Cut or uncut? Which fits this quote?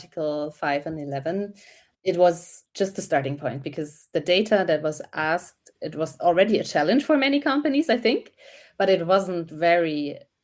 cut